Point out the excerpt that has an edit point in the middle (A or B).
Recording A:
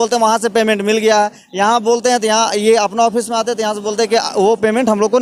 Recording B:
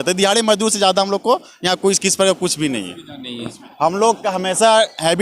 B